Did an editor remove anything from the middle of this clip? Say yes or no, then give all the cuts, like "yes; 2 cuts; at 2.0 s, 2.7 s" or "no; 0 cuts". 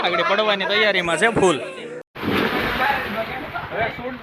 yes; 1 cut; at 2.0 s